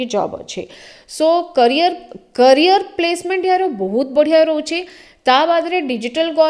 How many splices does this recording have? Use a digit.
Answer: 0